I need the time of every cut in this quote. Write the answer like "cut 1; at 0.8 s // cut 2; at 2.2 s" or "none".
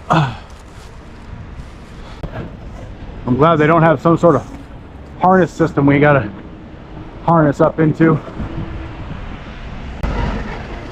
cut 1; at 2.2 s // cut 2; at 10.0 s